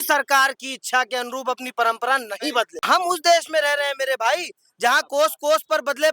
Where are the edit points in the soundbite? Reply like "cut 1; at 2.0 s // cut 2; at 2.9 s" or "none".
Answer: cut 1; at 2.8 s